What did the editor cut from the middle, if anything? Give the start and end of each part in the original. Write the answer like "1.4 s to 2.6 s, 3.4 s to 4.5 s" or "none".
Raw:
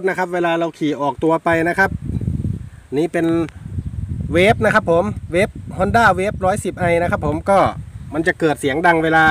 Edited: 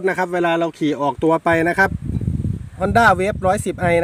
2.7 s to 5.7 s